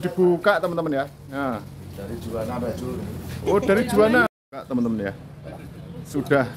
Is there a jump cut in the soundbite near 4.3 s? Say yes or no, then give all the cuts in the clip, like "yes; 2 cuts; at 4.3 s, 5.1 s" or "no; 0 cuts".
yes; 1 cut; at 4.3 s